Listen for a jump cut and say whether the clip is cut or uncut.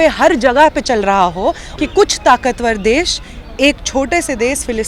cut